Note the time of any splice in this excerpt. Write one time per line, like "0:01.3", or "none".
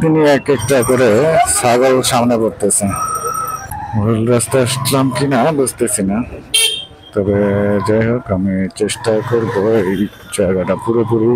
0:03.7